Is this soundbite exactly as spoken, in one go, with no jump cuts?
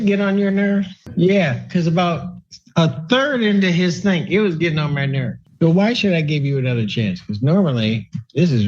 no; 1 cut; at 5.3 s

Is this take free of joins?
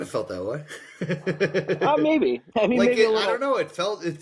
no; 1 cut; at 2.4 s

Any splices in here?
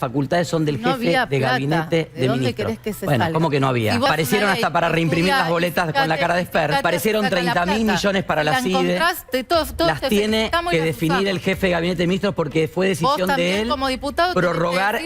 yes; 2 cuts; at 4.1 s, 6.8 s

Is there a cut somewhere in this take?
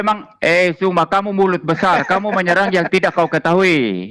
no; 0 cuts

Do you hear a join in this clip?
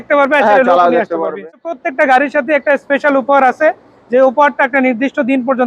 yes; 1 cut; at 1.8 s

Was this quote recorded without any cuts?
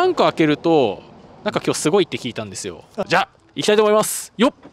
no; 1 cut; at 2.9 s

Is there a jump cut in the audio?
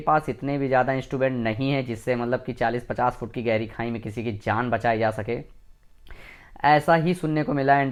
no; 0 cuts

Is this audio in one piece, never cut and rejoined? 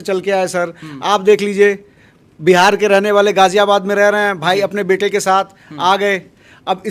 yes; 0 cuts

